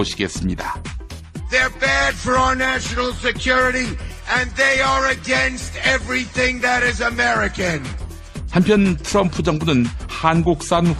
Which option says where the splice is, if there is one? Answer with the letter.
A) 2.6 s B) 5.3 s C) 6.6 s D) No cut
C